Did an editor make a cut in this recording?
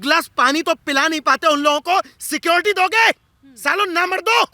no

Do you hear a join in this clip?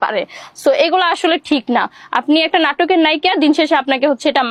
no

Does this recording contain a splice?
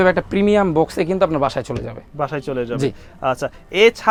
no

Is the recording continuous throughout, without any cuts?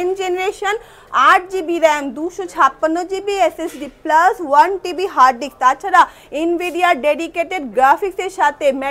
yes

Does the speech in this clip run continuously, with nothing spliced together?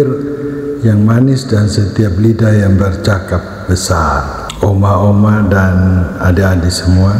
yes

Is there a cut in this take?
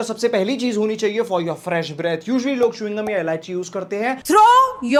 no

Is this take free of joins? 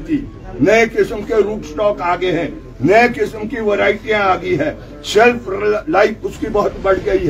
yes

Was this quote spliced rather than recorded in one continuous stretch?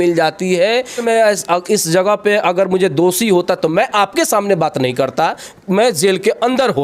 yes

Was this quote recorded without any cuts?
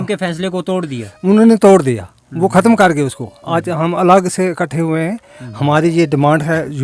yes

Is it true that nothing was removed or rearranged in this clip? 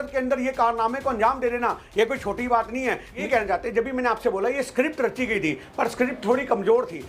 no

